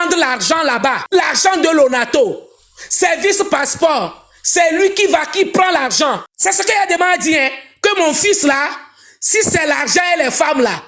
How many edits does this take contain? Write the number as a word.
two